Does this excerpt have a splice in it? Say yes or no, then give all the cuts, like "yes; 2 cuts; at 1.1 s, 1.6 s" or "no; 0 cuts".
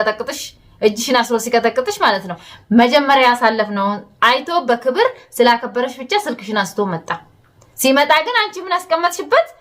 yes; 1 cut; at 2.4 s